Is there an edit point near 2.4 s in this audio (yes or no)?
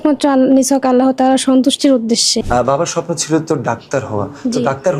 yes